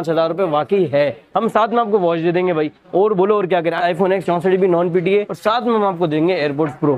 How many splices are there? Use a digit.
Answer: 3